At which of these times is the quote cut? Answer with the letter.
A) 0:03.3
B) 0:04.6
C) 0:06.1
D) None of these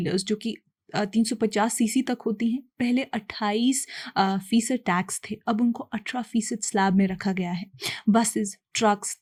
D